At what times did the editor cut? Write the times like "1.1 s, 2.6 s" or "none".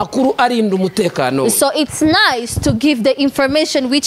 none